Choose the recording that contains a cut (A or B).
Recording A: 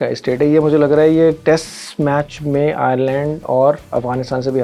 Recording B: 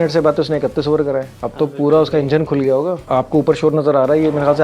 B